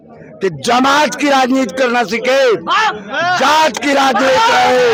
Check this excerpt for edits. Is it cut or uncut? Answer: uncut